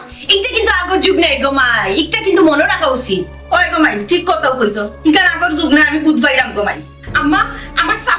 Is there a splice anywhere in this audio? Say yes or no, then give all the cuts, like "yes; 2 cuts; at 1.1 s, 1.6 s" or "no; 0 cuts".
no; 0 cuts